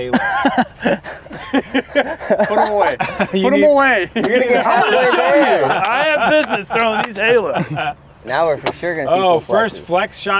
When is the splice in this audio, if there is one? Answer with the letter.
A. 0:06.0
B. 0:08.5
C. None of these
C